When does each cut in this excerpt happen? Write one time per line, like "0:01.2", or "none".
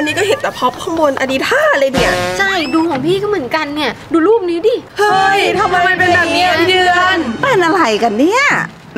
0:04.9